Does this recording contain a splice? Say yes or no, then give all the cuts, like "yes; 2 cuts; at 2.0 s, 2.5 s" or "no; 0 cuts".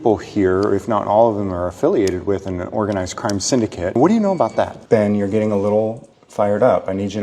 yes; 2 cuts; at 4.0 s, 4.8 s